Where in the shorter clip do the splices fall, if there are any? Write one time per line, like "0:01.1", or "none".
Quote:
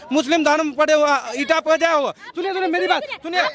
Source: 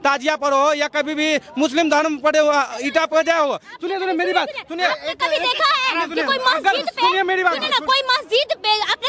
none